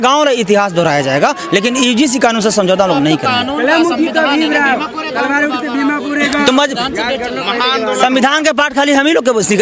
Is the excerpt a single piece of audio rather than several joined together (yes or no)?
yes